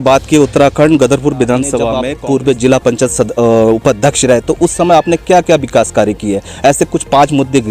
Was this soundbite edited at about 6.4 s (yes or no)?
no